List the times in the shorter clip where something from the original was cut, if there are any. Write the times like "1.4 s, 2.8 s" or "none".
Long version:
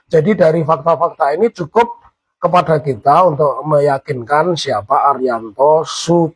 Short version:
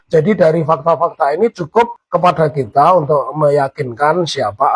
2.0 s